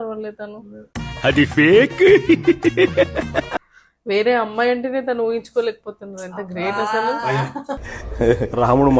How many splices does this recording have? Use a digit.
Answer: 1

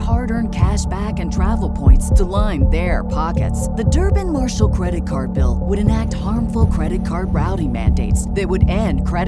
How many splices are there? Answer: 0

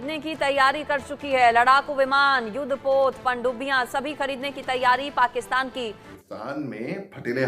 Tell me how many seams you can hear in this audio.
1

